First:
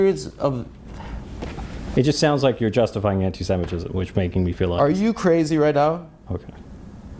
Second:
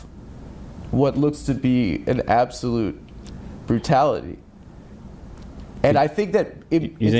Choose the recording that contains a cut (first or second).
second